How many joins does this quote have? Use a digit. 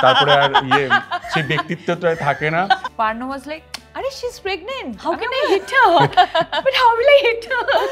1